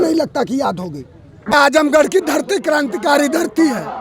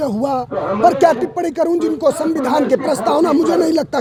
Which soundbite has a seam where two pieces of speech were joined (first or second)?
first